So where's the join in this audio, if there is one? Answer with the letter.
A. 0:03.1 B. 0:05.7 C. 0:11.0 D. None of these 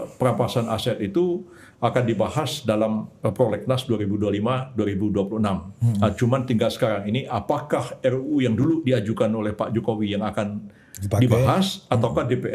D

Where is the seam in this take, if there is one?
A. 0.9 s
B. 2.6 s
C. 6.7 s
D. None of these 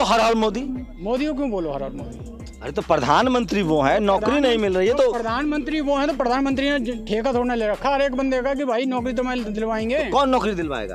A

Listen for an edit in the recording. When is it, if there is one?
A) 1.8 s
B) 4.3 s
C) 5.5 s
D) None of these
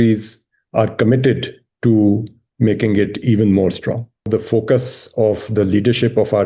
B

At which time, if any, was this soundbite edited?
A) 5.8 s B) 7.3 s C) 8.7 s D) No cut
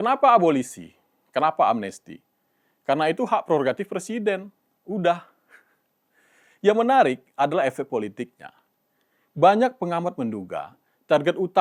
D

